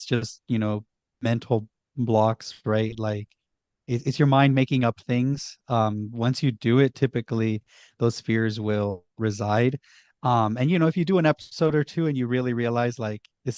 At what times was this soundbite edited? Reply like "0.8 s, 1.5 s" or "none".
1.1 s, 9.1 s